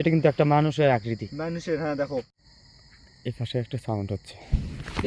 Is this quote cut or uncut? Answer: cut